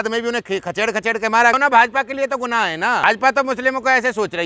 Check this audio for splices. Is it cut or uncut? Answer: cut